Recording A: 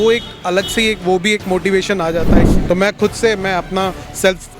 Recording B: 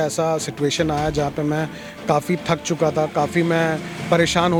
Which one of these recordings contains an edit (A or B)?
A